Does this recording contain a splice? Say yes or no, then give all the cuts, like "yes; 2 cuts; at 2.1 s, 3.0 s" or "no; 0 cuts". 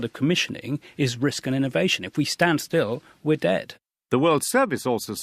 yes; 1 cut; at 3.7 s